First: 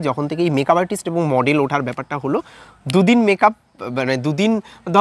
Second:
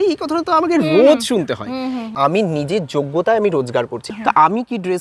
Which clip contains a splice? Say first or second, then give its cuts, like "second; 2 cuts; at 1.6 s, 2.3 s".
second; 2 cuts; at 2.1 s, 4.0 s